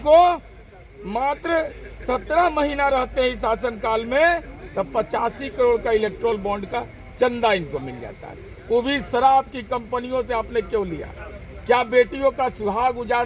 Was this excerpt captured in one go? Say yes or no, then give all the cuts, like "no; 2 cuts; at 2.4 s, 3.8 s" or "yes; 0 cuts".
yes; 0 cuts